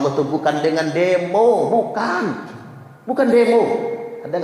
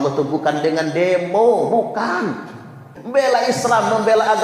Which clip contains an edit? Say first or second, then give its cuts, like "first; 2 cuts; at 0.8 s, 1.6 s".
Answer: second; 1 cut; at 2.9 s